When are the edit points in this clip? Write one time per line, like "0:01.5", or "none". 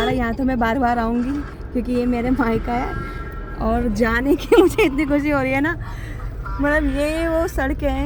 none